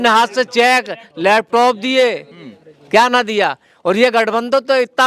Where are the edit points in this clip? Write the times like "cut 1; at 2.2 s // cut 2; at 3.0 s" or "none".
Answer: none